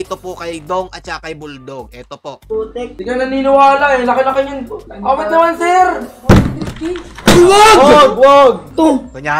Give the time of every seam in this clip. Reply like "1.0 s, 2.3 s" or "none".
none